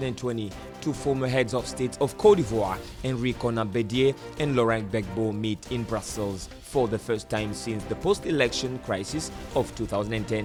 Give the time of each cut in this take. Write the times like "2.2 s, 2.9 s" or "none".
none